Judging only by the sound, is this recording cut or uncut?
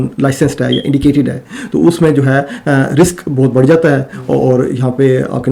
uncut